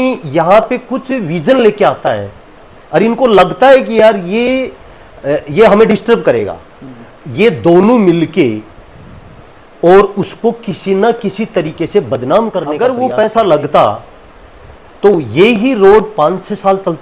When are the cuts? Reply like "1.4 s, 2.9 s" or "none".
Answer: 12.8 s